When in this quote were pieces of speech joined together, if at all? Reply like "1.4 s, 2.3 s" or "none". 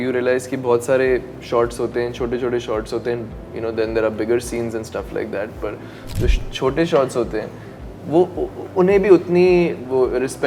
none